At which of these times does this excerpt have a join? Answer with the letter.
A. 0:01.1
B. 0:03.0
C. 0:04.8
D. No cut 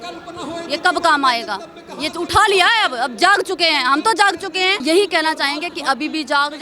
C